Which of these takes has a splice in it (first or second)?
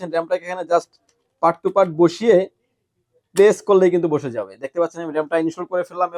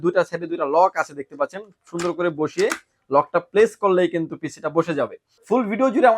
second